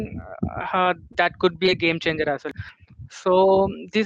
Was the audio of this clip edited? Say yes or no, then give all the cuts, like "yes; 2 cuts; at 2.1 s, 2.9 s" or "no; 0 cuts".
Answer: yes; 1 cut; at 2.5 s